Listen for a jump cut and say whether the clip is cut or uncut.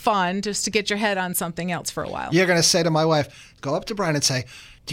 uncut